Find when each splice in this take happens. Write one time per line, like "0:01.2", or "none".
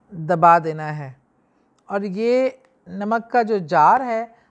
none